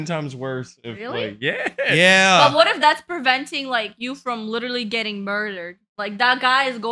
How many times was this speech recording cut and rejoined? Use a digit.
0